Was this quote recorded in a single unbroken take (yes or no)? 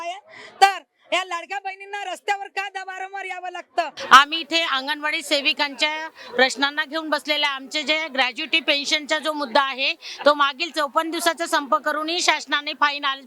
yes